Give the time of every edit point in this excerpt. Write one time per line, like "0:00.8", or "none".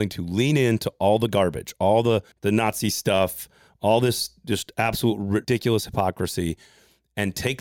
0:02.3
0:05.4